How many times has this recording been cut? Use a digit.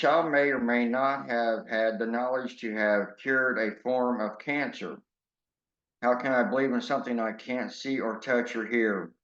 1